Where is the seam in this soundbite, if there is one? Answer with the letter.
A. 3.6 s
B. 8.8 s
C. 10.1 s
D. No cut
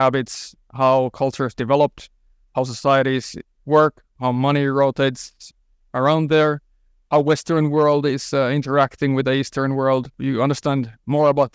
C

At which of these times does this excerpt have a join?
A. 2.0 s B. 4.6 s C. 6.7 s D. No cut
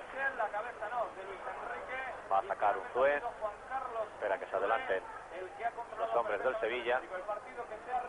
B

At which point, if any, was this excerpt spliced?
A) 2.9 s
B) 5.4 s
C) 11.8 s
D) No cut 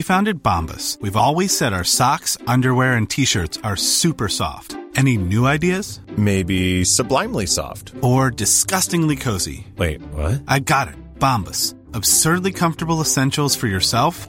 D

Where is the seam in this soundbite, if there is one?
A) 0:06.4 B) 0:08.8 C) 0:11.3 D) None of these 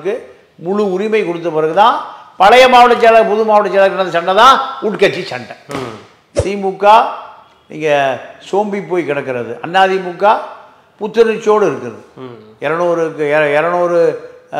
A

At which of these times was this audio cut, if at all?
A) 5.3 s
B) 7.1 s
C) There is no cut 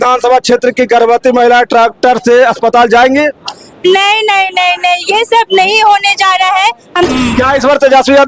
B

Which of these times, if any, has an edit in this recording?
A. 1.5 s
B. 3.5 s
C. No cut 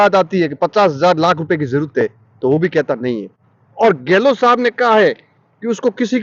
C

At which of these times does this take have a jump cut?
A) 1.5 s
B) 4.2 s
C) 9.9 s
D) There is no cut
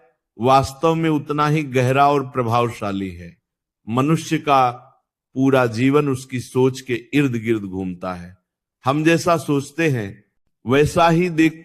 D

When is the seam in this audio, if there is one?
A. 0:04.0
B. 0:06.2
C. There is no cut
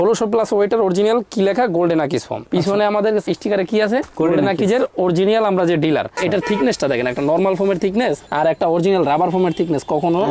B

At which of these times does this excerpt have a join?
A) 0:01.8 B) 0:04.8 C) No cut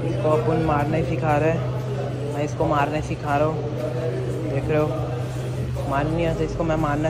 C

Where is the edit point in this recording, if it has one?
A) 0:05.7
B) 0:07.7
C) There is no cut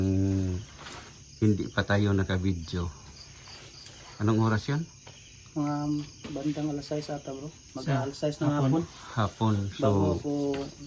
C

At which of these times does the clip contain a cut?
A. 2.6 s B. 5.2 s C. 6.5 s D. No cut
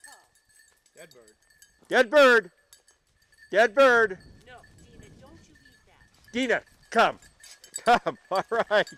D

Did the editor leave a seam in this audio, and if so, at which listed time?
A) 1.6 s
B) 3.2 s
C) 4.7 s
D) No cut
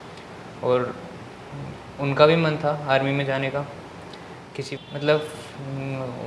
C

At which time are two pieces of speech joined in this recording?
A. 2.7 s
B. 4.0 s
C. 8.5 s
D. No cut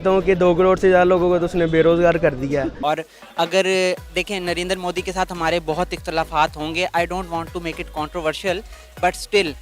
A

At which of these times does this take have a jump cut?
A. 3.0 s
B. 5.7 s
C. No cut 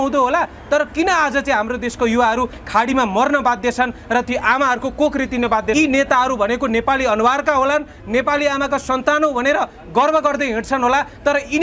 B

